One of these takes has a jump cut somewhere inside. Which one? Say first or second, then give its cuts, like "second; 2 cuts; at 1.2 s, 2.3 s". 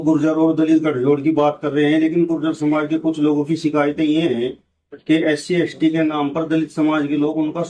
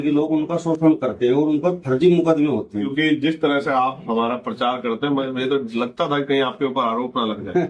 second; 1 cut; at 2.9 s